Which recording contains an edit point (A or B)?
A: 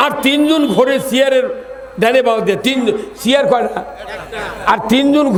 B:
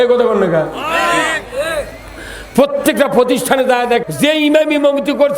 B